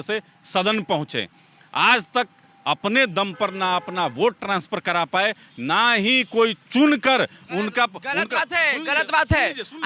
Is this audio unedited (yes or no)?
yes